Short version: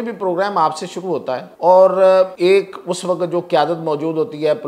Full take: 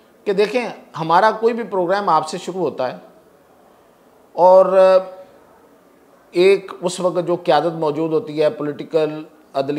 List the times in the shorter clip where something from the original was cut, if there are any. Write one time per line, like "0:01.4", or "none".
0:01.5
0:02.3